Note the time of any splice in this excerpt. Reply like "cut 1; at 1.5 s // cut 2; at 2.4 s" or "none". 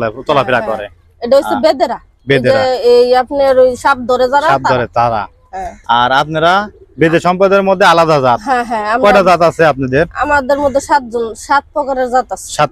none